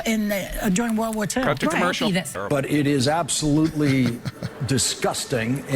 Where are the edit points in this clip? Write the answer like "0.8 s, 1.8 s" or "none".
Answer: 2.3 s